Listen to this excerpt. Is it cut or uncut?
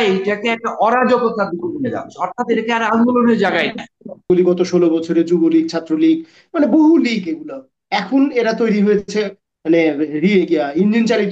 cut